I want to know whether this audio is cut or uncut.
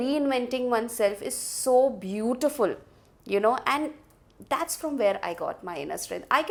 uncut